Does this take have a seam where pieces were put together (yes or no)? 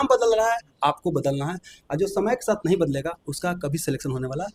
no